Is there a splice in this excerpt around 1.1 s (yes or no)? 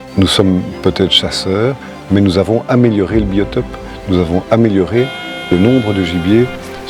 no